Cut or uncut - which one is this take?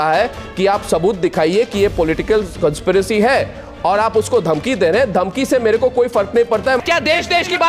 cut